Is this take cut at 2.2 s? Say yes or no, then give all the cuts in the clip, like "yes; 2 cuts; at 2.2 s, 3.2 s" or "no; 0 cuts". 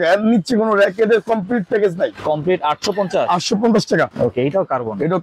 yes; 2 cuts; at 2.2 s, 4.1 s